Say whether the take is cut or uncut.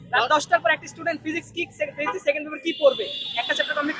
uncut